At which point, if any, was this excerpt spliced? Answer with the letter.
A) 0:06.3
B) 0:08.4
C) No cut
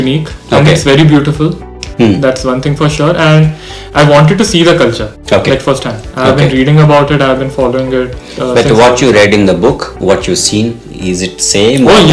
C